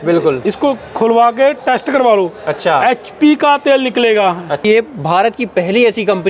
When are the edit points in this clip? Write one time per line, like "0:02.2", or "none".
0:04.6

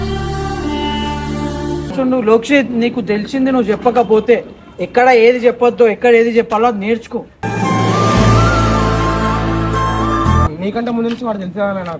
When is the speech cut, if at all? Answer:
0:01.9
0:10.5

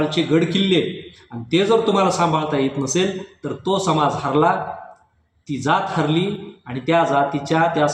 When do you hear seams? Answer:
none

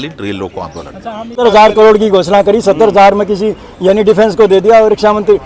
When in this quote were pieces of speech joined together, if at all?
0:01.4

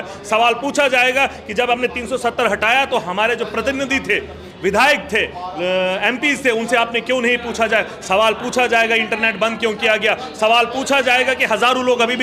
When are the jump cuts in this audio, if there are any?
none

